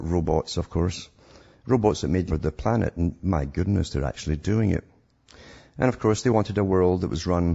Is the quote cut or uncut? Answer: uncut